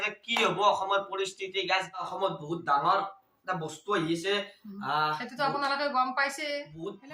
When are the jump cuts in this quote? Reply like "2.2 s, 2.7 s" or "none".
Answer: 2.1 s